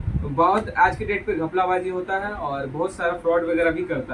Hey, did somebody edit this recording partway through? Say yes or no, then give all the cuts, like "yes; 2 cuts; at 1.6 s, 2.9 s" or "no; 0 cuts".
no; 0 cuts